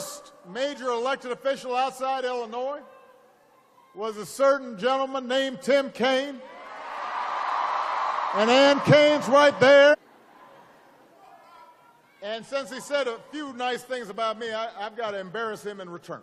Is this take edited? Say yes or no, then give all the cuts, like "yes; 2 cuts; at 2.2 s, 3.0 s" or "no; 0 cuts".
no; 0 cuts